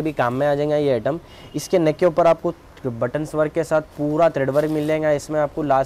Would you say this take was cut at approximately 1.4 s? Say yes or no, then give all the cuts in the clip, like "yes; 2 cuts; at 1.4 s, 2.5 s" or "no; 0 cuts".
no; 0 cuts